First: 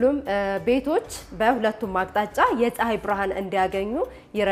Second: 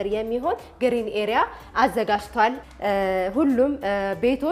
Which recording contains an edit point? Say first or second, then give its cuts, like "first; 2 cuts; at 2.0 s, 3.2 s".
second; 1 cut; at 2.6 s